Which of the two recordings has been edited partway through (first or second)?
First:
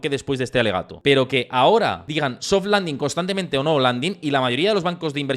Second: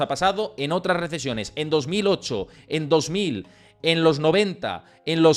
first